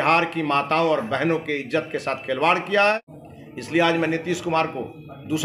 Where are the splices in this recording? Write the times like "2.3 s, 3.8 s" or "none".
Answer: 3.2 s